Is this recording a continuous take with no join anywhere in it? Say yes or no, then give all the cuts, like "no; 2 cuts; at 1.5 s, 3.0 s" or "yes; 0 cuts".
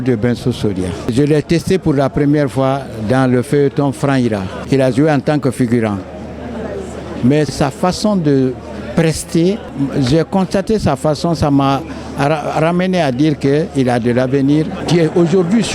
no; 5 cuts; at 1.1 s, 4.5 s, 7.5 s, 9.7 s, 14.8 s